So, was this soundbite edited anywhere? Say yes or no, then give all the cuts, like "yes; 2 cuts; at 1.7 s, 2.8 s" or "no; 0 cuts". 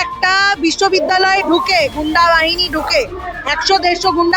no; 0 cuts